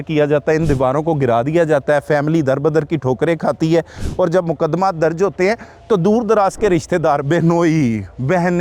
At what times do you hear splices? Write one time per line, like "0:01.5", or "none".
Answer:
none